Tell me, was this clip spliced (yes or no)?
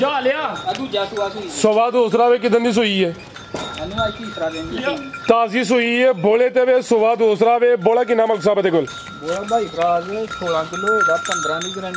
no